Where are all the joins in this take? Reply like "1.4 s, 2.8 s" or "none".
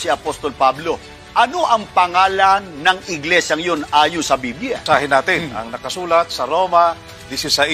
4.8 s

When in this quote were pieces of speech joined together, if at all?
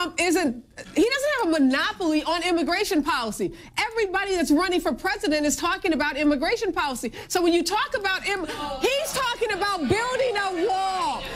1.7 s

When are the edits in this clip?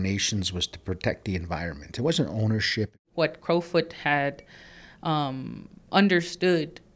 3.0 s

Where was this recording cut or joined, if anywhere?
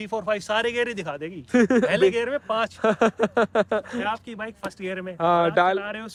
none

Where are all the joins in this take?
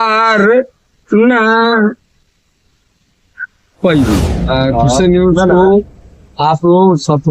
4.4 s

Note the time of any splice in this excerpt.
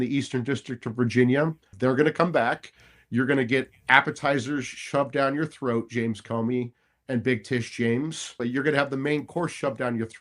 1.6 s, 8.4 s

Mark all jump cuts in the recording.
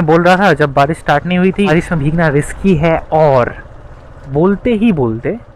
1.7 s

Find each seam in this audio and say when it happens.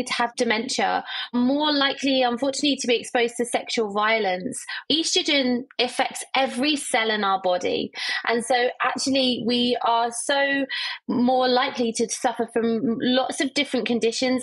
1.3 s, 4.7 s

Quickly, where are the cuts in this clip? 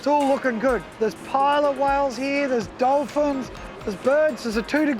0.9 s

